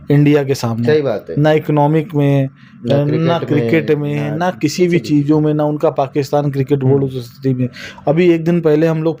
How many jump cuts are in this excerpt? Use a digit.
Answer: 0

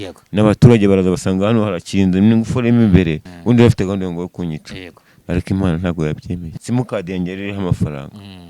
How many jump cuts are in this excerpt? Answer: 2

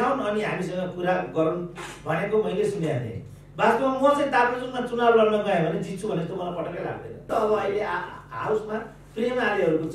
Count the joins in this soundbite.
1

